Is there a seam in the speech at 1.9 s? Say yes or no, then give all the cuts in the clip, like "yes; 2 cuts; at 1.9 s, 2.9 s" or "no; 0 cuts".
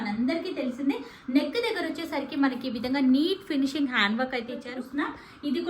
no; 1 cut; at 4.7 s